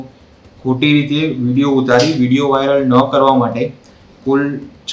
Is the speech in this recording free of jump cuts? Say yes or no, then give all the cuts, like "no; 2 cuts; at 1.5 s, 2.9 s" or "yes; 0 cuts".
yes; 0 cuts